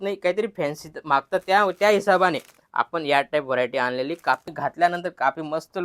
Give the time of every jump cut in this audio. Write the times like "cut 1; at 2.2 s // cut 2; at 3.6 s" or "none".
cut 1; at 4.5 s

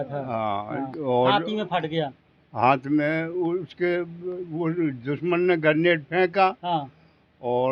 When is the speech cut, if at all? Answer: none

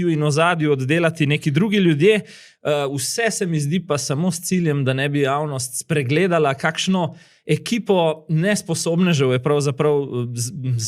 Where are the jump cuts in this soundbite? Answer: none

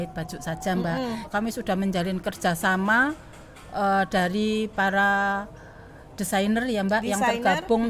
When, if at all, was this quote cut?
cut 1; at 1.3 s

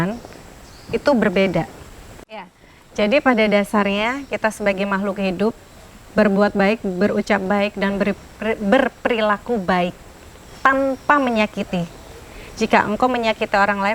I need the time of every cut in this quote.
cut 1; at 2.5 s

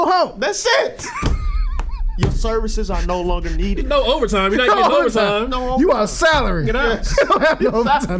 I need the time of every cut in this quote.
none

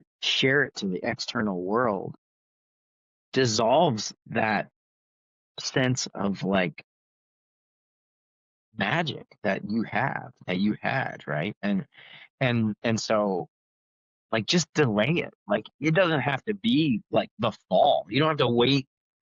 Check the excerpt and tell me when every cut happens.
none

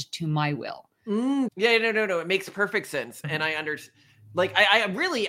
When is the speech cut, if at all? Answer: cut 1; at 1.5 s

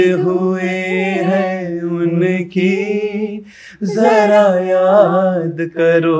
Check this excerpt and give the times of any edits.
none

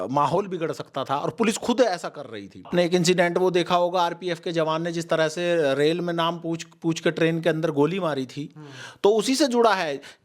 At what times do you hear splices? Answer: cut 1; at 2.7 s

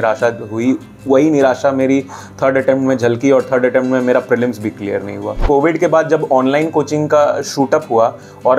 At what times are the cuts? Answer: cut 1; at 5.4 s

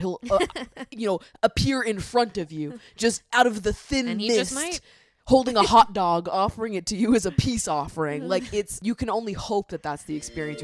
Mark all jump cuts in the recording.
cut 1; at 8.7 s

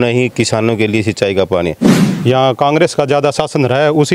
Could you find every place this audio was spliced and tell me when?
cut 1; at 2.0 s

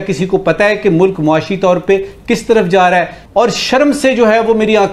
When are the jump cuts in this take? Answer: cut 1; at 3.2 s

